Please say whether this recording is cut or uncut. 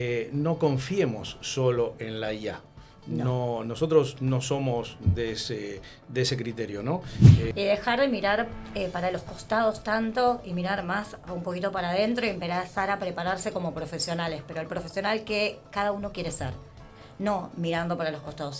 cut